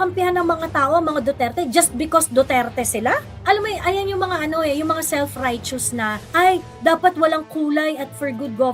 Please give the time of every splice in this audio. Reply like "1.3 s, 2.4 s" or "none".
none